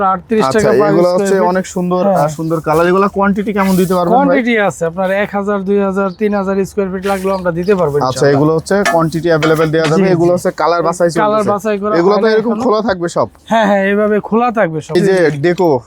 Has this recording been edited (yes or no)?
yes